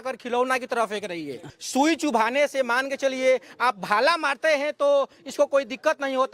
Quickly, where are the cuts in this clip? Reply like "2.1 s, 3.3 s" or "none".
1.4 s